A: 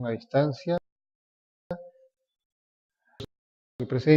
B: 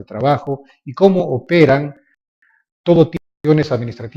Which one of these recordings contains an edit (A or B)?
B